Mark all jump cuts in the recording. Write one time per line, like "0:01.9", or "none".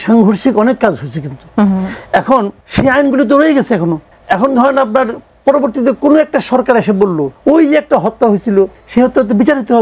0:02.6
0:04.1
0:07.3
0:08.8